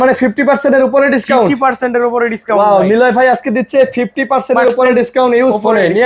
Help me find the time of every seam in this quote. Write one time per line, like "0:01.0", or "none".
none